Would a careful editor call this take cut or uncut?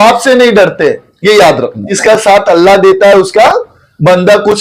cut